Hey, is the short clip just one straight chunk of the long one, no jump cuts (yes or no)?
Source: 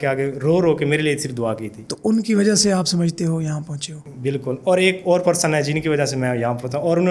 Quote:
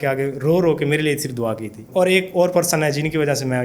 no